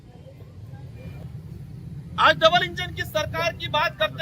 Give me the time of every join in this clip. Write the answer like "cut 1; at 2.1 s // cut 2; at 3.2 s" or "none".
cut 1; at 1.0 s